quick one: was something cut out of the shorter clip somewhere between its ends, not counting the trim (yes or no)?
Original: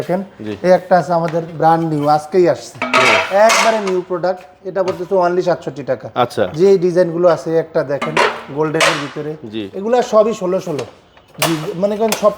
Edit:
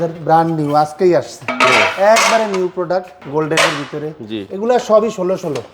yes